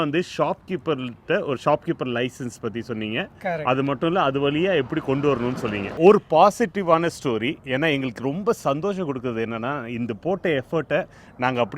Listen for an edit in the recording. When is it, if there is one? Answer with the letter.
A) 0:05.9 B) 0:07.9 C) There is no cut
A